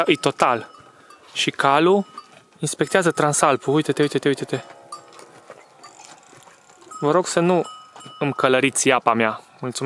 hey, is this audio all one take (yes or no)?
yes